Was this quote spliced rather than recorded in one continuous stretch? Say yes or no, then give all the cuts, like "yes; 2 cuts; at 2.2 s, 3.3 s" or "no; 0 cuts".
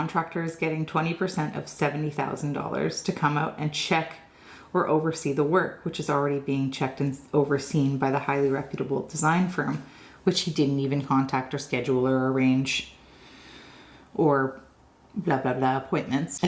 no; 0 cuts